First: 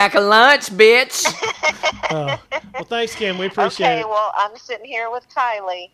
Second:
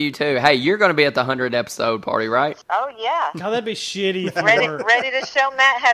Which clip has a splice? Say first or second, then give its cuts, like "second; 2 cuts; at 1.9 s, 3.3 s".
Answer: second; 1 cut; at 2.6 s